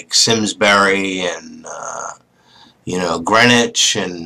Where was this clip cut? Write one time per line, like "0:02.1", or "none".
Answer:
0:02.6